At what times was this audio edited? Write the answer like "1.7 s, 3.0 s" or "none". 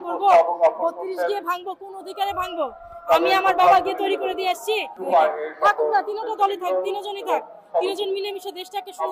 4.9 s